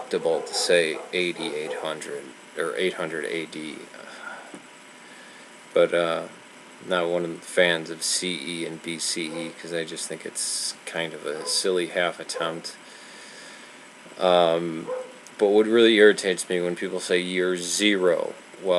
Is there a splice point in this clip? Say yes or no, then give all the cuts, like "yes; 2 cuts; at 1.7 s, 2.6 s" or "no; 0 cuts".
yes; 1 cut; at 8.9 s